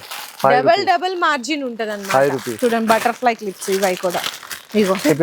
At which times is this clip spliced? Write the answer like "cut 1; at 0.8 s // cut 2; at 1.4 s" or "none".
cut 1; at 2.5 s